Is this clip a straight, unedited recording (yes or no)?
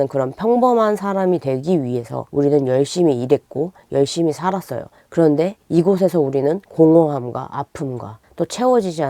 no